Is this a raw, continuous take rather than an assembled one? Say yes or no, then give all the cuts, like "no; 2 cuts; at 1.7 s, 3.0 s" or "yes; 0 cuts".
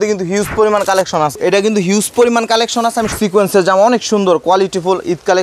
no; 2 cuts; at 1.3 s, 3.1 s